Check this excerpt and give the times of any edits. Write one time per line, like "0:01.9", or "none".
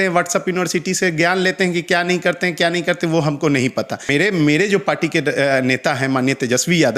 0:04.1